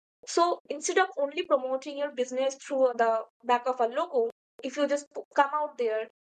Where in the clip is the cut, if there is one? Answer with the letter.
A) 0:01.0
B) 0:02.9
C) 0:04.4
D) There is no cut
B